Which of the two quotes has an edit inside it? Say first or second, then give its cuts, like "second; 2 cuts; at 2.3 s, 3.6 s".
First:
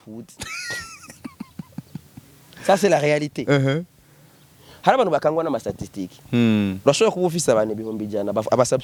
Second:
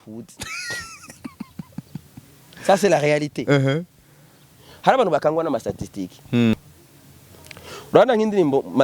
second; 1 cut; at 6.5 s